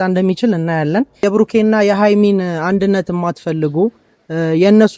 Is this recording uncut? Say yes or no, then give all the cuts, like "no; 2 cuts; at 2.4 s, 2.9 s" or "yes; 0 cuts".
no; 1 cut; at 1.2 s